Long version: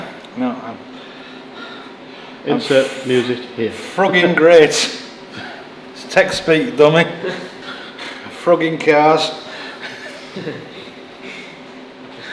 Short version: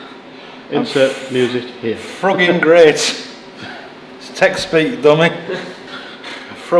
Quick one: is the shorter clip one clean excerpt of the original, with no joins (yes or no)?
yes